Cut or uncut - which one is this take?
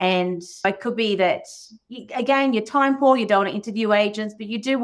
uncut